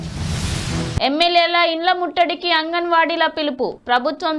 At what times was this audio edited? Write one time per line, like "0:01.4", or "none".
0:01.0